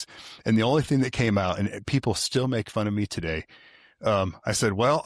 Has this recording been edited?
no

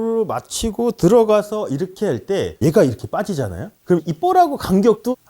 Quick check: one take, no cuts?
no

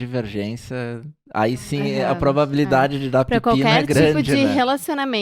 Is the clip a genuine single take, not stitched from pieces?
yes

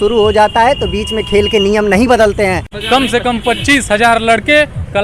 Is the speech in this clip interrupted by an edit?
yes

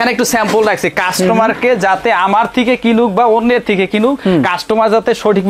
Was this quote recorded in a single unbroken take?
yes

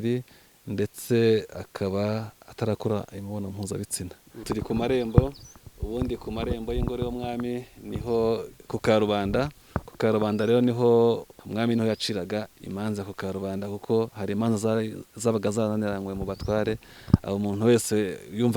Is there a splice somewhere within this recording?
yes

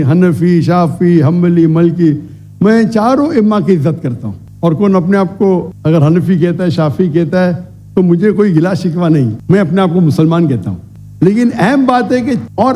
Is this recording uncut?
yes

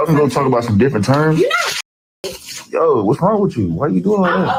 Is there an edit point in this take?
no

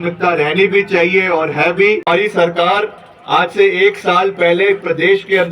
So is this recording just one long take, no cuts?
no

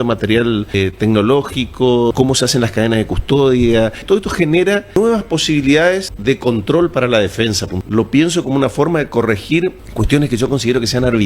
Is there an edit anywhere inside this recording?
yes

